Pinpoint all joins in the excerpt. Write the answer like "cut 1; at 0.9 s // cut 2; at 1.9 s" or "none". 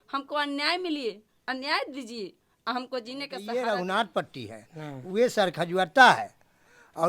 cut 1; at 3.4 s